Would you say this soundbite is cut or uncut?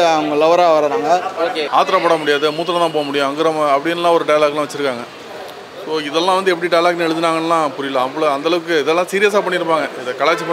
cut